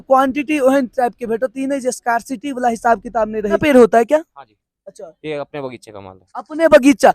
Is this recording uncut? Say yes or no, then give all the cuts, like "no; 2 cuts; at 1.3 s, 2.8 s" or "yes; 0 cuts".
no; 1 cut; at 3.6 s